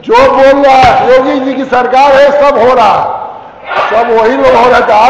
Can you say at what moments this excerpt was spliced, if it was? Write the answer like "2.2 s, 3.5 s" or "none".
none